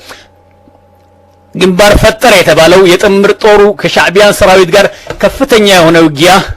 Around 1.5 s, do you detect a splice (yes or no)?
no